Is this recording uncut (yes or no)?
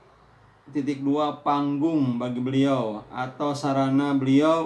yes